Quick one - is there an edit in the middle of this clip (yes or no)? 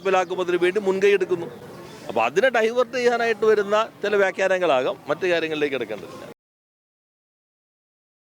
no